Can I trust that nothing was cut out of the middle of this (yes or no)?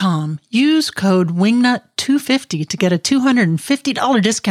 yes